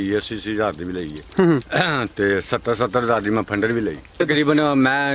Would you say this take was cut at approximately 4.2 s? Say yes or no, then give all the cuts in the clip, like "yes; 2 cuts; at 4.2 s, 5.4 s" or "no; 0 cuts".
yes; 1 cut; at 4.2 s